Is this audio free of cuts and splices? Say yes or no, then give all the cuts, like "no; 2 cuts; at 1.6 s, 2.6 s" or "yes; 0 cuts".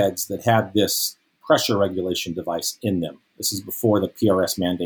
yes; 0 cuts